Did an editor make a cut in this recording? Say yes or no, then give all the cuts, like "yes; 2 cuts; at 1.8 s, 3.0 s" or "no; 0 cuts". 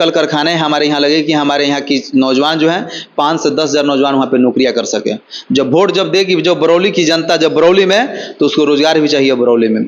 no; 0 cuts